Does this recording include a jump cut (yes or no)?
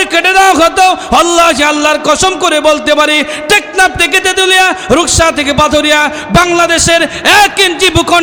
no